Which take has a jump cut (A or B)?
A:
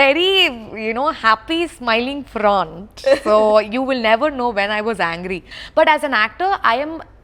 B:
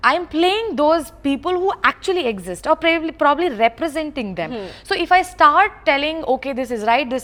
A